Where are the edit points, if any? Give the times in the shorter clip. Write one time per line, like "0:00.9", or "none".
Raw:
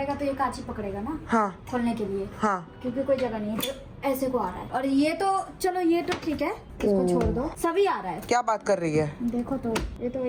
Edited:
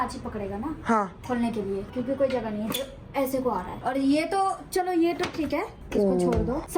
0:01.9